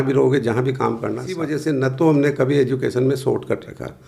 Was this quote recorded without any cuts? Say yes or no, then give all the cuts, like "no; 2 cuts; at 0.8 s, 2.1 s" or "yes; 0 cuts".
no; 1 cut; at 1.5 s